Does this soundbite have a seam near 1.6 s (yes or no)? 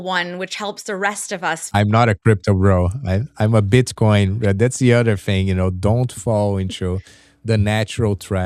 yes